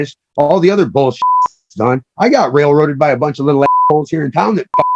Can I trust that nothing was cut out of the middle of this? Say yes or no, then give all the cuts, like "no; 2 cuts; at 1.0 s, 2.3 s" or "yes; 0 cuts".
yes; 0 cuts